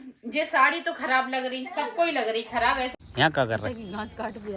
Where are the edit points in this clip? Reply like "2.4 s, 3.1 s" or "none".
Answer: 3.0 s